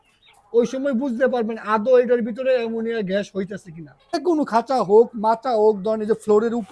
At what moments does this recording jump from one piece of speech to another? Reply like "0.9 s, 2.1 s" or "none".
4.2 s